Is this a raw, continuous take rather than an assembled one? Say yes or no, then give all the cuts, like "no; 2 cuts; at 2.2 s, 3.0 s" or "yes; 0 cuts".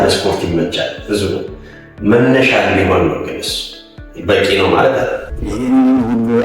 no; 1 cut; at 5.3 s